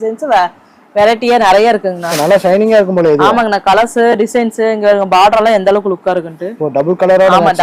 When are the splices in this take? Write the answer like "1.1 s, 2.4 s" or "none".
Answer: 2.1 s